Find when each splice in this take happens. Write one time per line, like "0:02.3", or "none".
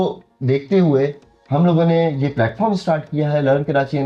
none